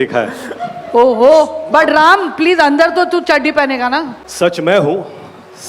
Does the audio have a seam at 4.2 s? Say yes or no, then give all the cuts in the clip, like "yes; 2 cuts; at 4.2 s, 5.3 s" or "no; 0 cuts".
yes; 1 cut; at 4.2 s